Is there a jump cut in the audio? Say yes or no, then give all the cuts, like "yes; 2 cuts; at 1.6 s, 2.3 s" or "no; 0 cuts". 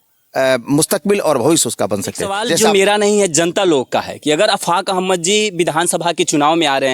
yes; 1 cut; at 2.6 s